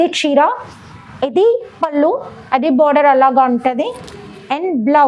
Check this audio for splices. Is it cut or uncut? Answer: uncut